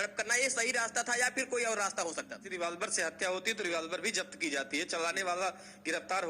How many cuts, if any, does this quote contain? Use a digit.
1